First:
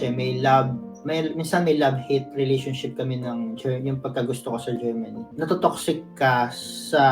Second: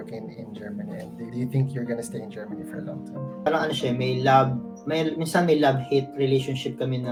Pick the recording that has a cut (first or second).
first